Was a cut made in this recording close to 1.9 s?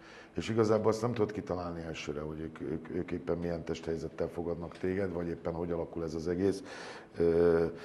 no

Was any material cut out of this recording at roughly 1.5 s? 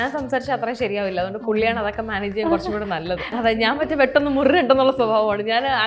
no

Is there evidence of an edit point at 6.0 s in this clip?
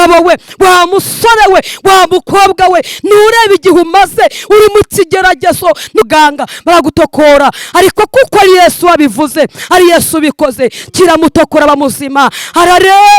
yes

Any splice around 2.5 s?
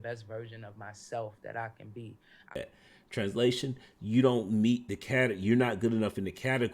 yes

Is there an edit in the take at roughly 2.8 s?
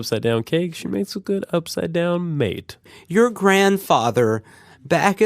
yes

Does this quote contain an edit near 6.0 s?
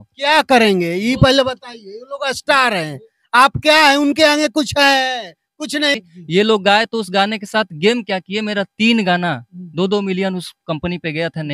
yes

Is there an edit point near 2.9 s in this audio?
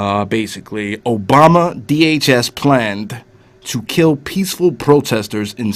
no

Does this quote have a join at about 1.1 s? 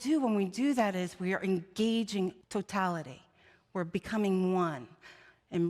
no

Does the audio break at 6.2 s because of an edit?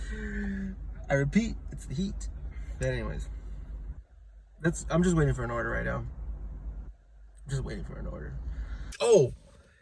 no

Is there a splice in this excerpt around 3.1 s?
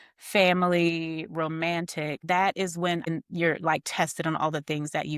yes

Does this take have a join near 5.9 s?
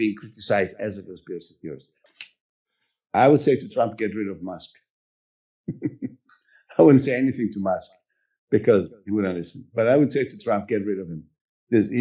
no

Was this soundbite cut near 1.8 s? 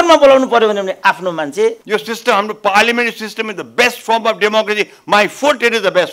yes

